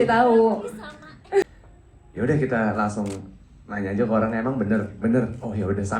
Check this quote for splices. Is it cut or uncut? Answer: cut